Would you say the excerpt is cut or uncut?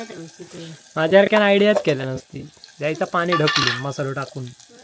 uncut